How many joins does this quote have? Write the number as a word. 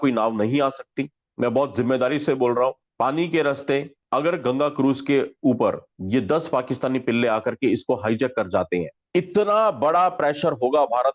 zero